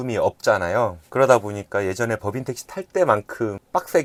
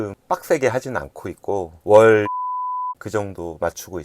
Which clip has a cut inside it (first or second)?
second